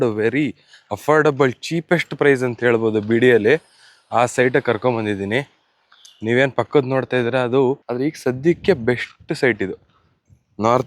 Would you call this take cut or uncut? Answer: cut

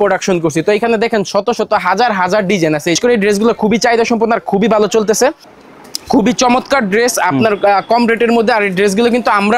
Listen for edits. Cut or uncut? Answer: cut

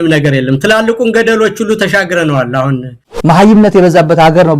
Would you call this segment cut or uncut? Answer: cut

